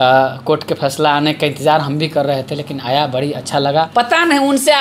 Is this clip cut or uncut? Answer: cut